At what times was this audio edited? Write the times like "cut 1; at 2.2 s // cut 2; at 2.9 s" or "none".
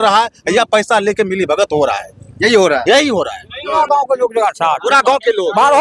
cut 1; at 3.8 s